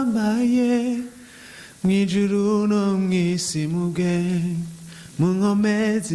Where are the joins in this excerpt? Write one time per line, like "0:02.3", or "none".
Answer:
none

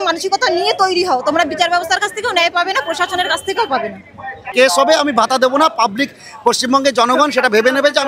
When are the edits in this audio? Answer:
0:04.5

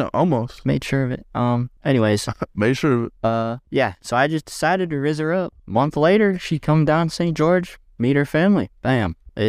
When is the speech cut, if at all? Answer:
0:01.7
0:03.3

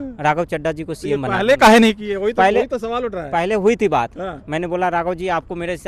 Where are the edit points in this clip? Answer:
none

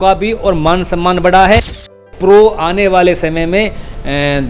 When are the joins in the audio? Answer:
0:02.0

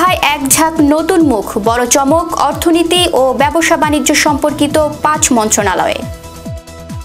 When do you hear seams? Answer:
0:06.0

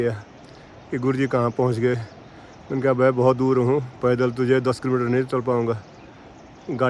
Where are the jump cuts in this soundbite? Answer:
none

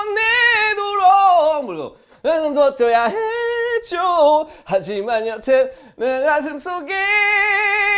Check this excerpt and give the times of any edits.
none

